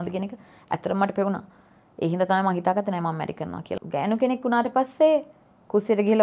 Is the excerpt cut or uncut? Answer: cut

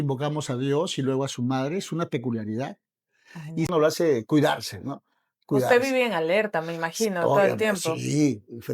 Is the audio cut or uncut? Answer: cut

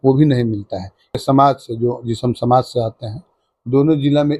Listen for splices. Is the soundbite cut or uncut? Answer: cut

